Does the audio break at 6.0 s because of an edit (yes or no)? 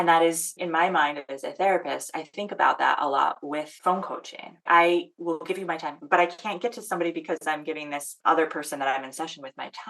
yes